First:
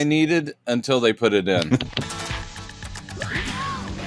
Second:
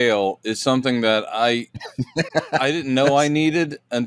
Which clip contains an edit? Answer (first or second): first